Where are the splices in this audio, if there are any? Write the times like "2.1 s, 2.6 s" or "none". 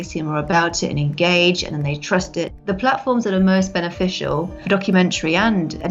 2.6 s, 4.6 s